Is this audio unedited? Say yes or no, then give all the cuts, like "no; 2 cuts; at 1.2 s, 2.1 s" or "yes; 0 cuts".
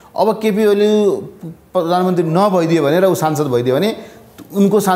yes; 0 cuts